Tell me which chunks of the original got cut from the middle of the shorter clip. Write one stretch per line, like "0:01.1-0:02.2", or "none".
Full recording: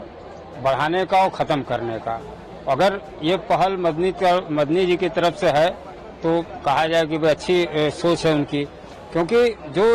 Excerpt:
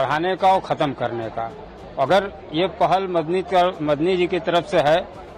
none